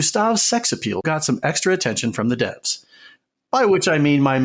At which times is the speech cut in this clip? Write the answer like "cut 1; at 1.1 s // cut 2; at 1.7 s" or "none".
cut 1; at 1.0 s